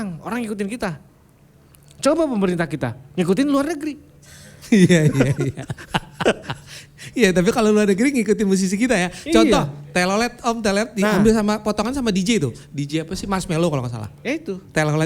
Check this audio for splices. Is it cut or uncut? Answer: uncut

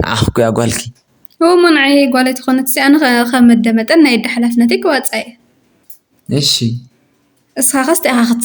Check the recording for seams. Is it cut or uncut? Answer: uncut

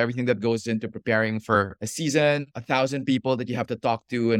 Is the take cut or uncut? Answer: uncut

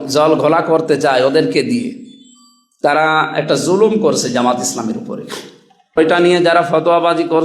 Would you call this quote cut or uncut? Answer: cut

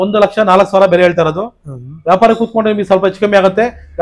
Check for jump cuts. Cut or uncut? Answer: uncut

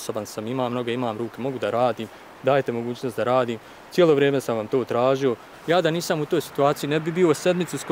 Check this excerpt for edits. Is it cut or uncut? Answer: cut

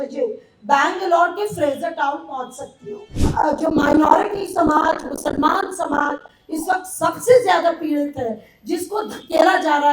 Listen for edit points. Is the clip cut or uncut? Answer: cut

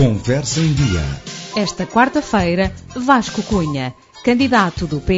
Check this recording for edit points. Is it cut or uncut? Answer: cut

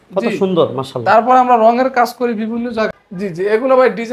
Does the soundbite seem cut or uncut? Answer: cut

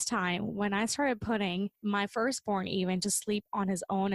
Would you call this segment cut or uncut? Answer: cut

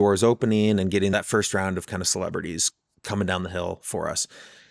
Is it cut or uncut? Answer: cut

